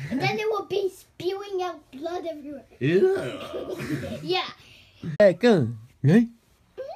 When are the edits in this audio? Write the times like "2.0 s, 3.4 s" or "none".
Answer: none